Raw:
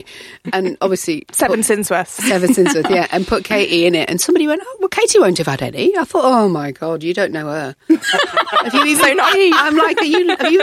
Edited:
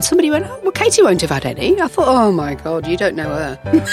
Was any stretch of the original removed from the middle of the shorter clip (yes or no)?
no